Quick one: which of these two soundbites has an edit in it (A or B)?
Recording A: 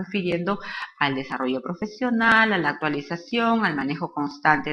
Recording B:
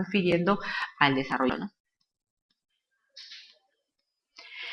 A